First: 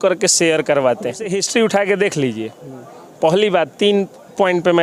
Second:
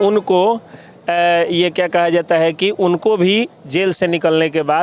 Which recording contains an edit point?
first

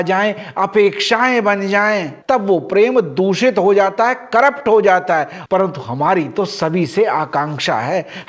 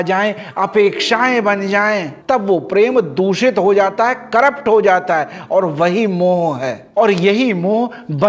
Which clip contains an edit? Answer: first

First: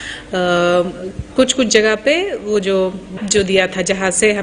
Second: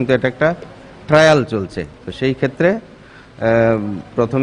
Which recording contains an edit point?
first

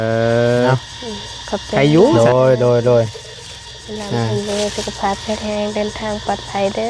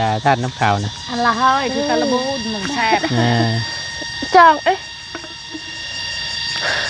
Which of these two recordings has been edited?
first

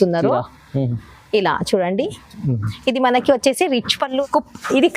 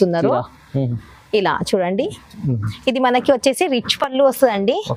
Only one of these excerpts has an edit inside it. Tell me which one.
first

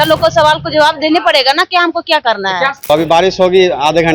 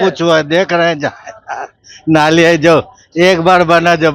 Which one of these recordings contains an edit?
first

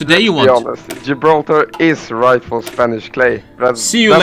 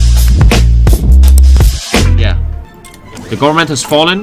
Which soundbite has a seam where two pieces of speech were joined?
second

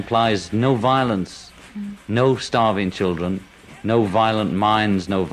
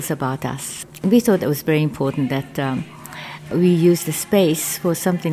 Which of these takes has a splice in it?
second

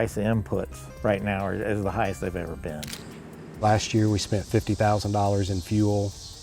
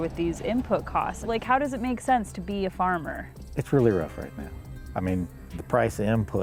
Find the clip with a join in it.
first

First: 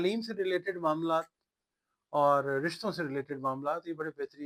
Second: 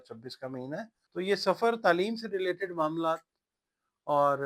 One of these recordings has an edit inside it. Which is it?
second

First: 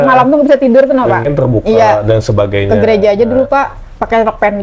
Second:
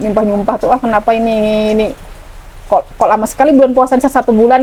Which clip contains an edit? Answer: first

